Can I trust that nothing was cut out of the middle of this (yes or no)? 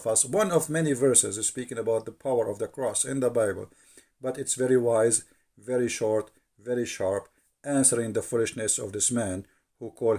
yes